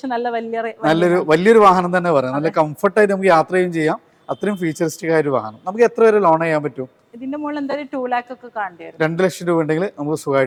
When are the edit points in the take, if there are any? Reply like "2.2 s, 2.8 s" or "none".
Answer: none